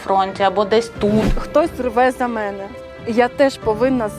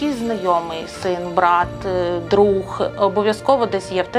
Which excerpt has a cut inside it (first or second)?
first